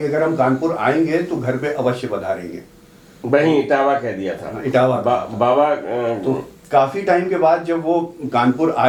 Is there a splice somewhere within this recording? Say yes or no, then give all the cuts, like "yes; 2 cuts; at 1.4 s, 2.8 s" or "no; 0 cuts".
no; 0 cuts